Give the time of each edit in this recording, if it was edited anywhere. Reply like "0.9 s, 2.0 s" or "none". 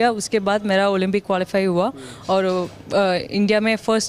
none